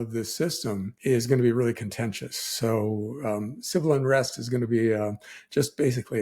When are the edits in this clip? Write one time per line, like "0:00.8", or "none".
0:00.9